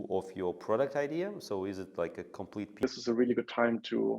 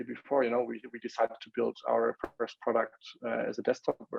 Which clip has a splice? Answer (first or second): first